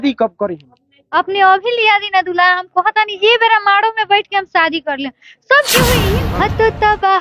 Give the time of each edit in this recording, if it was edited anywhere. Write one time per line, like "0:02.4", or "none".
0:06.0